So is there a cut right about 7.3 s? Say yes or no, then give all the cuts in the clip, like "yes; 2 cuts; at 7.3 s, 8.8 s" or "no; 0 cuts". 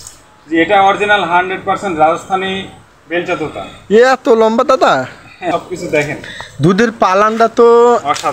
no; 1 cut; at 5.4 s